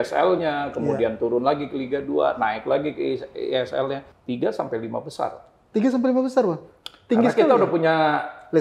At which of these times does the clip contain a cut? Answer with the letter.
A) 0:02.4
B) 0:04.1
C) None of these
B